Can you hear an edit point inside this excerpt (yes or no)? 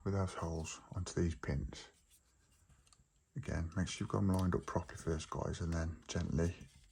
no